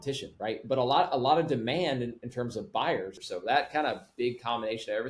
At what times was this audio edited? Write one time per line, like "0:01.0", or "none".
0:03.2